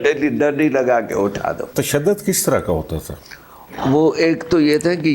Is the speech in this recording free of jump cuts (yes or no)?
no